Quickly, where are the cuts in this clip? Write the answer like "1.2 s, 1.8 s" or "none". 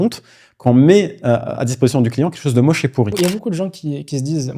3.1 s